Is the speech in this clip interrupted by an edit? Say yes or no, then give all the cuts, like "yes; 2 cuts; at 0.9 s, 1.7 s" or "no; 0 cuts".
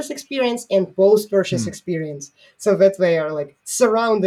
no; 0 cuts